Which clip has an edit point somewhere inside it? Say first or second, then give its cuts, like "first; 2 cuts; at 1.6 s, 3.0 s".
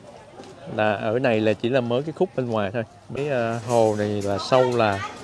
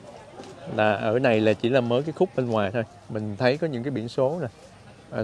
first; 1 cut; at 3.2 s